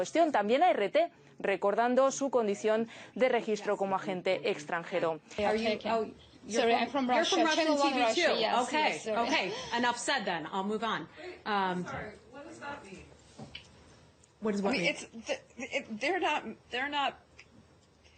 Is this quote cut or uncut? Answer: cut